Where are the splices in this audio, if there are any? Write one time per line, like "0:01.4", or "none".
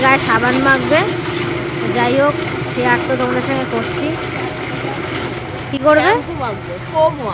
0:06.1